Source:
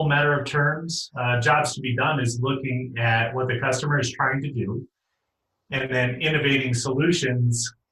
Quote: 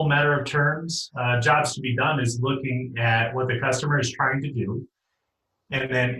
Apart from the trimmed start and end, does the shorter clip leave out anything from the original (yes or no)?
no